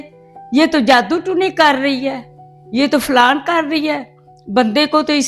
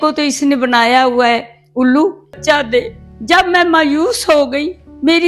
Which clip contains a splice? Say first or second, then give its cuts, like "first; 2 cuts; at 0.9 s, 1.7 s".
second; 1 cut; at 2.4 s